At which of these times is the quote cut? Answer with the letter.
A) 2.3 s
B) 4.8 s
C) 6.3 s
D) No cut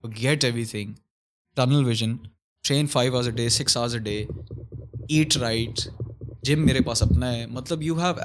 D